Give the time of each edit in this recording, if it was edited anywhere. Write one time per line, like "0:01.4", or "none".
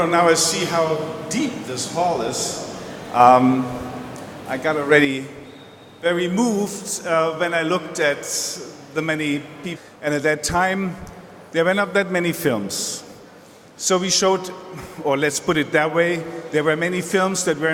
none